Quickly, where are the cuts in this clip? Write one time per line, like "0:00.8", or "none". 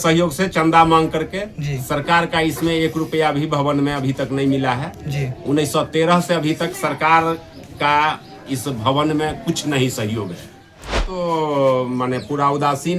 0:11.1